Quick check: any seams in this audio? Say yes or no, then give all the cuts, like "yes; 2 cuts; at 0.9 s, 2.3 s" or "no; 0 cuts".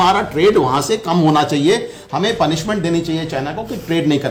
no; 0 cuts